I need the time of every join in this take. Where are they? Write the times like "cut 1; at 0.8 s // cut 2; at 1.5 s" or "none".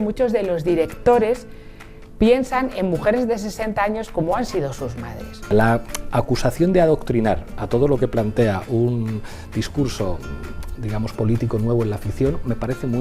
cut 1; at 5.4 s